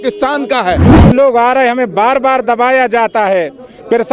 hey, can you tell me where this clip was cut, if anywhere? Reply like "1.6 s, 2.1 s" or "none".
1.0 s